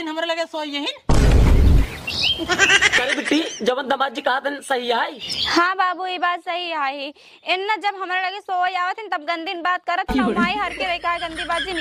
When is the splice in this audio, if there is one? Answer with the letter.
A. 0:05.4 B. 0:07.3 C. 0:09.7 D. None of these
D